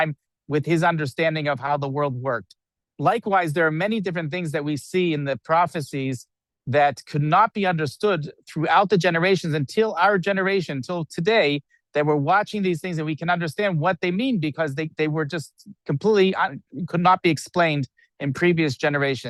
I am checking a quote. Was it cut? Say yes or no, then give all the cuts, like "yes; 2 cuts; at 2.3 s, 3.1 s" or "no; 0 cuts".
no; 0 cuts